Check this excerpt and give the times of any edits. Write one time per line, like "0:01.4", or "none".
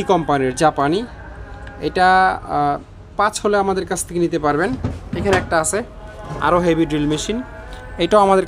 none